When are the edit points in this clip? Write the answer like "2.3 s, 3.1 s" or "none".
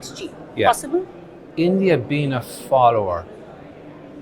none